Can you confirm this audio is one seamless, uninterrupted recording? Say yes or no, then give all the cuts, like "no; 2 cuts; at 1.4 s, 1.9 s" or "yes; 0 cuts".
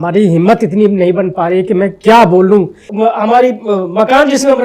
no; 1 cut; at 2.8 s